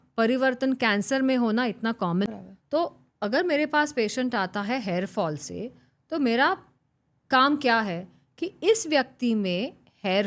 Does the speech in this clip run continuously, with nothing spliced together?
no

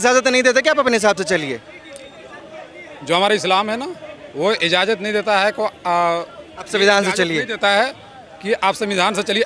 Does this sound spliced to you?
no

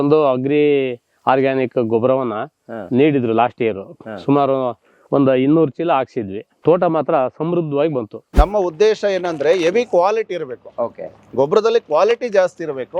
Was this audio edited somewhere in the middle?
yes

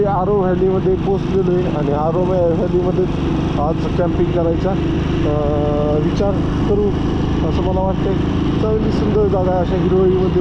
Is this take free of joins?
yes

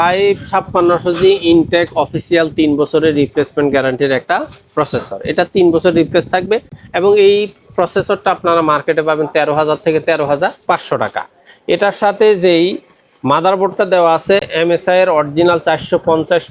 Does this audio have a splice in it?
no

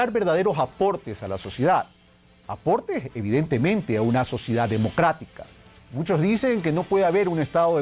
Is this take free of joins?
yes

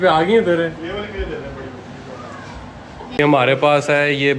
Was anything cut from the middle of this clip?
yes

